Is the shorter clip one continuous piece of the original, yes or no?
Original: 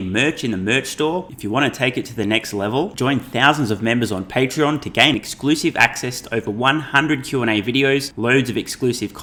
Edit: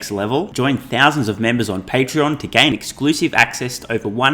yes